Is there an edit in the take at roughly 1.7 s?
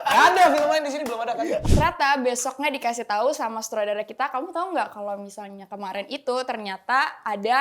yes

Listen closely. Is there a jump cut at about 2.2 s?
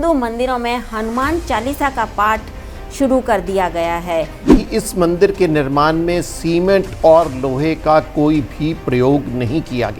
no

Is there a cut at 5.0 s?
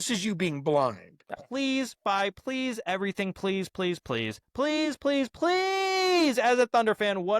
no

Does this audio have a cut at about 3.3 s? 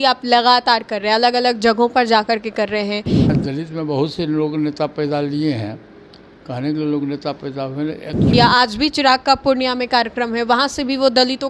yes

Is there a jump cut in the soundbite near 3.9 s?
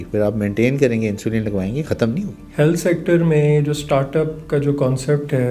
no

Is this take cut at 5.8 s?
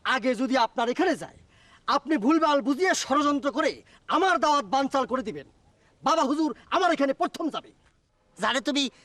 yes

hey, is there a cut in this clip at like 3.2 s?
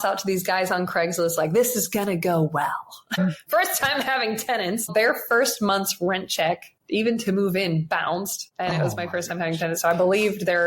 yes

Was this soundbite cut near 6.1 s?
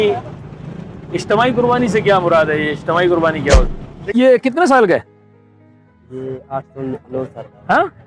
no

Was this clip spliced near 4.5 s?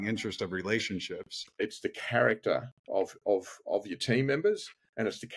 no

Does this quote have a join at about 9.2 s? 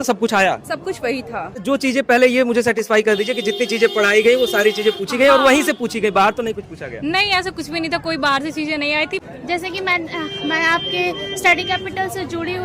yes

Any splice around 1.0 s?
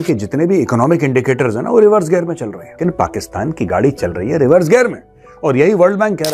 no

